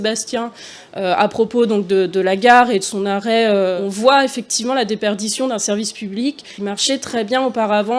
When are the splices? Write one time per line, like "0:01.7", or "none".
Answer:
0:03.8
0:06.5